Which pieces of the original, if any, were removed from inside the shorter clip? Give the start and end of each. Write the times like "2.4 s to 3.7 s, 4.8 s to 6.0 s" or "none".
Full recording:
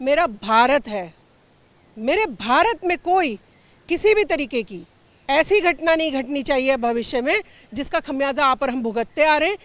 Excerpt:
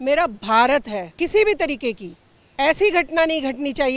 1.0 s to 3.7 s